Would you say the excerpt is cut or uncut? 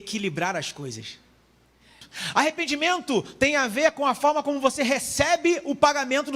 cut